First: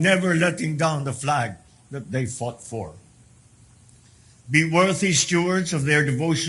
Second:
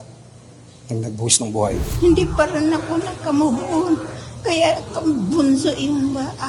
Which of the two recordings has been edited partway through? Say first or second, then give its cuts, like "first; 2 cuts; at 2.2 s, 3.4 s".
second; 1 cut; at 1.9 s